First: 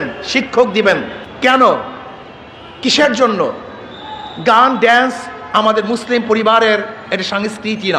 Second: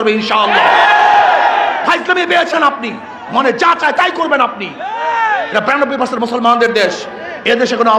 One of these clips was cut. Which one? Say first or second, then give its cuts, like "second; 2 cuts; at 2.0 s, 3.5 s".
first; 1 cut; at 1.2 s